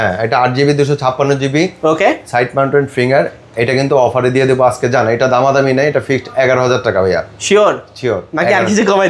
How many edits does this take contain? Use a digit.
0